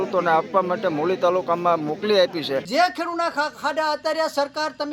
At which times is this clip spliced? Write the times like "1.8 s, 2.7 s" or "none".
2.7 s